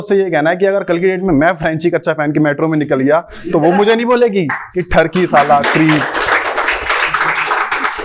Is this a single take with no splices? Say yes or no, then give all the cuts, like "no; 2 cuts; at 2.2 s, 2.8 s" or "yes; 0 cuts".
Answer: yes; 0 cuts